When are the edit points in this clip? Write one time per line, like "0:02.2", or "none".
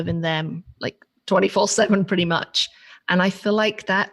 none